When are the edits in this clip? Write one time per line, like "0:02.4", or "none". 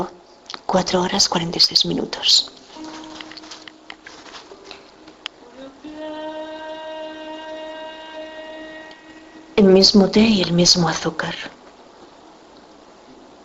none